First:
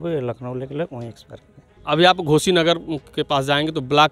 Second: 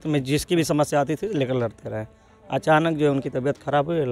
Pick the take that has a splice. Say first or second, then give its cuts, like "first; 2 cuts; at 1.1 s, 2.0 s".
first; 1 cut; at 1.7 s